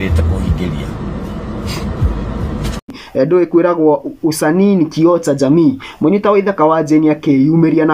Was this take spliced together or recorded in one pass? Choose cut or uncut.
cut